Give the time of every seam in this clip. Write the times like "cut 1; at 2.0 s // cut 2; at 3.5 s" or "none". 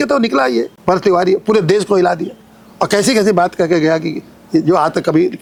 none